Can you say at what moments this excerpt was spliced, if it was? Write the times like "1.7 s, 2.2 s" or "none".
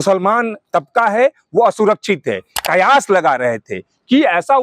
2.5 s